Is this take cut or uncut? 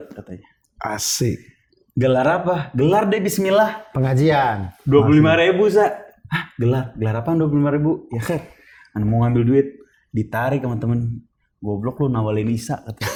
uncut